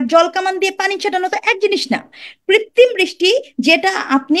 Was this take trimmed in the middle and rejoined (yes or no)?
no